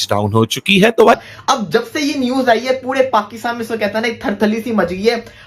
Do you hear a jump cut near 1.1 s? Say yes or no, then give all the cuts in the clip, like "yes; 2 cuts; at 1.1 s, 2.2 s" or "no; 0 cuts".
yes; 1 cut; at 1.1 s